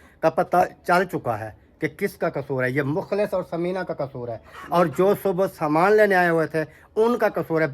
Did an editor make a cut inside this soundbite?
no; 0 cuts

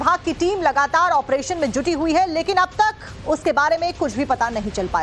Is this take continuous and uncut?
yes; 0 cuts

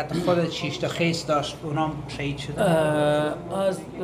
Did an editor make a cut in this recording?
no; 0 cuts

